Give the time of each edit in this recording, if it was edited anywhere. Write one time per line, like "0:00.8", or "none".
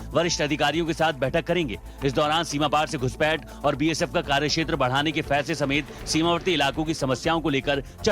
0:06.6